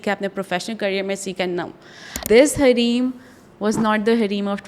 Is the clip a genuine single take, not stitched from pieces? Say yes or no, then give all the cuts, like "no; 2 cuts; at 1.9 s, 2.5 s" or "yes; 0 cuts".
no; 1 cut; at 2.2 s